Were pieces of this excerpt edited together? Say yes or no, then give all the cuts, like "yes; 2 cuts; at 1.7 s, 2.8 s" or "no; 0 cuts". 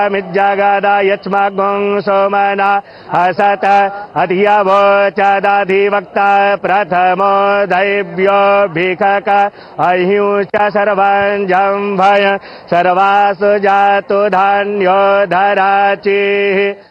yes; 1 cut; at 3.5 s